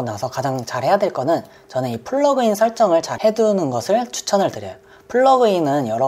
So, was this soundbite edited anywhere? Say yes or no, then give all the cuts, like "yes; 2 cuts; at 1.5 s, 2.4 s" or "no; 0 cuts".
no; 0 cuts